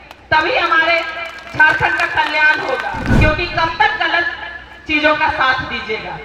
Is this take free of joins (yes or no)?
no